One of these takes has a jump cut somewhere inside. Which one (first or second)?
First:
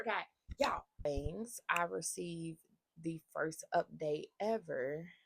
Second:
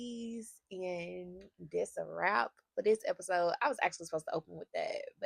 first